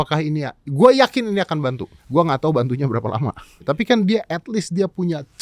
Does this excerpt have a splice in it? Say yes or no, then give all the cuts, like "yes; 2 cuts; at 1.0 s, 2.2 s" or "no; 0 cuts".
yes; 2 cuts; at 1.9 s, 3.6 s